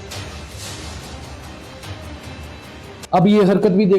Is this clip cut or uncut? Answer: cut